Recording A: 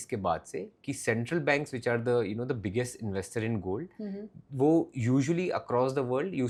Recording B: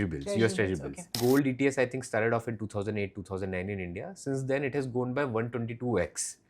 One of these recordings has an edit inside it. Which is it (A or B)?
B